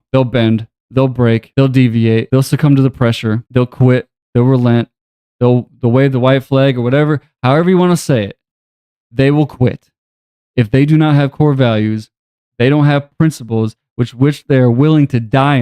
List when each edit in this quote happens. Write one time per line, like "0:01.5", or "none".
0:01.5
0:02.3
0:03.4